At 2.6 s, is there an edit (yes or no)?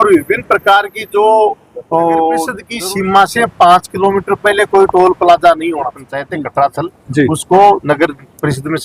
yes